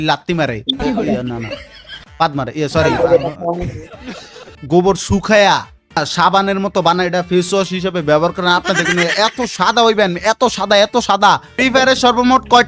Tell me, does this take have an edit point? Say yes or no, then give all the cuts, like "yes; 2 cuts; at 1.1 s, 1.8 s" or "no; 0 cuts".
yes; 3 cuts; at 4.5 s, 6.0 s, 11.5 s